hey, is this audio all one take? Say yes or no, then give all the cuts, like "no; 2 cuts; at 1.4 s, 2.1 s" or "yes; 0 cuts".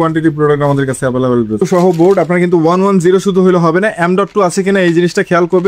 no; 1 cut; at 1.6 s